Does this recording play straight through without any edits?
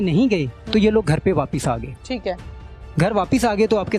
no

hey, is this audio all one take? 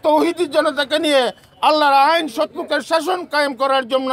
yes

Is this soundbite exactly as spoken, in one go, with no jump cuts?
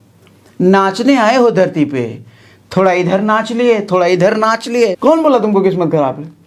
no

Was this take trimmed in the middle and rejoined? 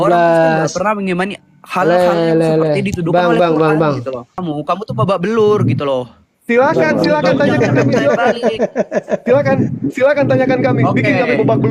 yes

